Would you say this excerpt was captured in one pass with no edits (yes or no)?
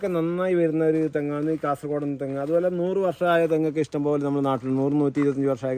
yes